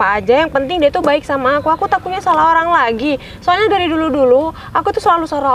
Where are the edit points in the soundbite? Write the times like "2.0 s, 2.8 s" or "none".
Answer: none